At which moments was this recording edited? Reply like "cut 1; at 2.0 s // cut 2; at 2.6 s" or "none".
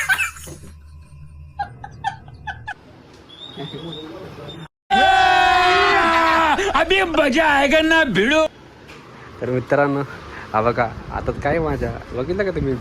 cut 1; at 2.8 s // cut 2; at 8.6 s